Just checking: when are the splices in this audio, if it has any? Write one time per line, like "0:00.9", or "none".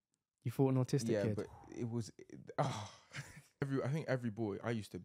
0:03.7